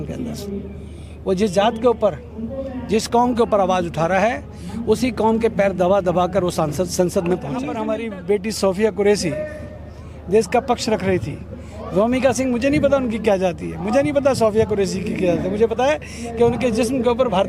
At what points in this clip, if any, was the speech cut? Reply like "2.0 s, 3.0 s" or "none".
7.7 s